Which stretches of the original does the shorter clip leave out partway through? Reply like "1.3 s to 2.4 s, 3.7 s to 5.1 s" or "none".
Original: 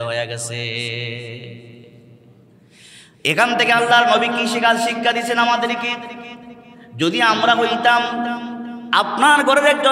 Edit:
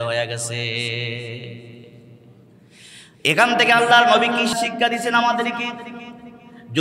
4.5 s to 4.8 s